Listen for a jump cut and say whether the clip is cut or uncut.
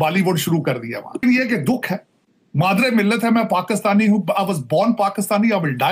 cut